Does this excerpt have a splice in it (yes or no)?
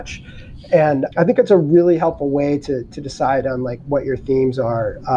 no